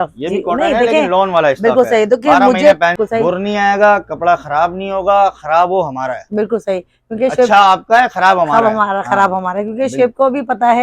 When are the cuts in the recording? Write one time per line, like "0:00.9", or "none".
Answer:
0:03.0